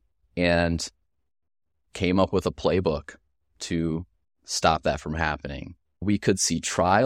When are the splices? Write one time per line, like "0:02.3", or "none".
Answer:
0:06.0